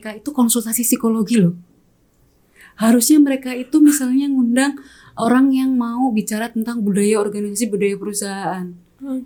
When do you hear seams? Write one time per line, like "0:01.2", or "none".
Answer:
none